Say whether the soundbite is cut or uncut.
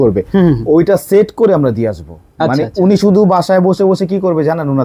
uncut